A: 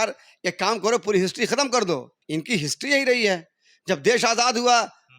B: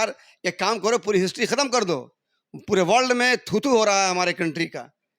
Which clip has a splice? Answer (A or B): A